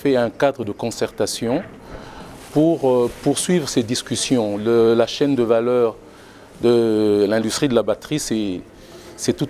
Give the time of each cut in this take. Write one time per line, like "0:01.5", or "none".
none